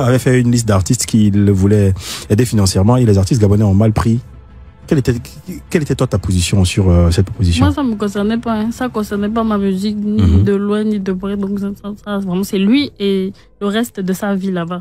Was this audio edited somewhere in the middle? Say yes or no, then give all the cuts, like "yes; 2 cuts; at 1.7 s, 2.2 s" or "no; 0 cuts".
no; 0 cuts